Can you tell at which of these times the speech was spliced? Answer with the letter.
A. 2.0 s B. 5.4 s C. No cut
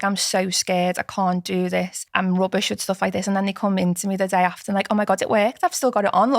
A